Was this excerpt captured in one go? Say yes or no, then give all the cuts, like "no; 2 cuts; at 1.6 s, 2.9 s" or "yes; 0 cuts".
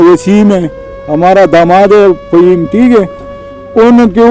yes; 0 cuts